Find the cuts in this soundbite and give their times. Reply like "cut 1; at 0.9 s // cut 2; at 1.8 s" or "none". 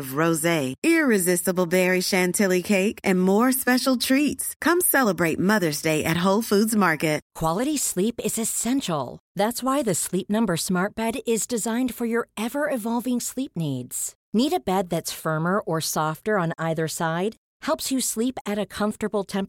cut 1; at 7.3 s